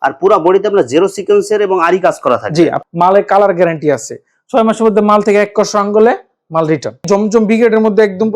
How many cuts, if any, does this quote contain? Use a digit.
2